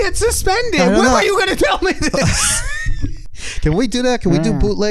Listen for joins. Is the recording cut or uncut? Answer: cut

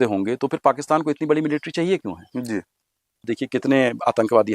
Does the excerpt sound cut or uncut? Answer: cut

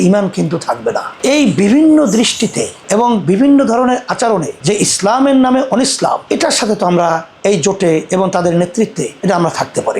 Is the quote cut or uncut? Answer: uncut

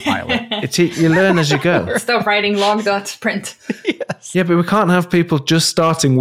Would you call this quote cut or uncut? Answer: uncut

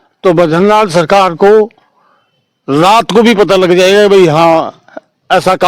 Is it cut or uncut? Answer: uncut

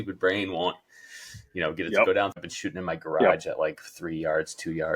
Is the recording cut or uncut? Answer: cut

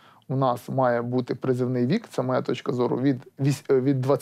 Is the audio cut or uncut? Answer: uncut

